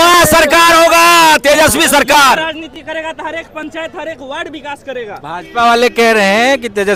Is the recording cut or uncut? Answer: uncut